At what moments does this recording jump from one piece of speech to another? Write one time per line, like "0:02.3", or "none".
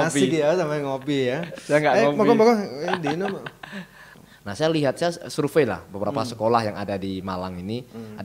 0:04.0